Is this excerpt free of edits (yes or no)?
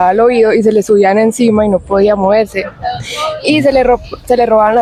yes